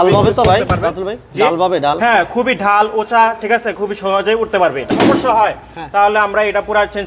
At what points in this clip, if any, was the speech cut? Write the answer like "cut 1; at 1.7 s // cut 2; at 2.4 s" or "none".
cut 1; at 4.9 s